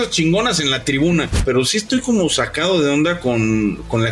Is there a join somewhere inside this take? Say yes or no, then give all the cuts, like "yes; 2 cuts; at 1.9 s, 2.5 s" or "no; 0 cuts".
yes; 1 cut; at 1.4 s